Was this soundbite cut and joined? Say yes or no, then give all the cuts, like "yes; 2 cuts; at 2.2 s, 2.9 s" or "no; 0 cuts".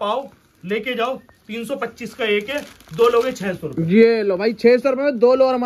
no; 0 cuts